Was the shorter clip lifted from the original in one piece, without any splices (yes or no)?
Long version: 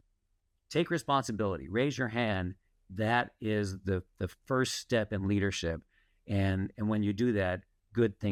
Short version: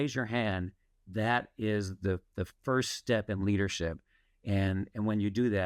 yes